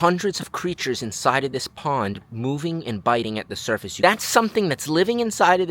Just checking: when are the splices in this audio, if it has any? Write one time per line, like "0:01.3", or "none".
0:03.9